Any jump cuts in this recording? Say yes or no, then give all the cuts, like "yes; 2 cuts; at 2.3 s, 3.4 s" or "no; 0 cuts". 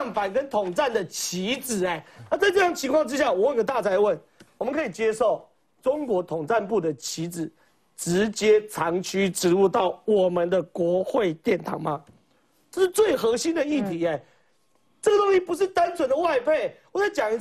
no; 0 cuts